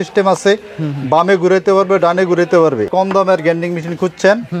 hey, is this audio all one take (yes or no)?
no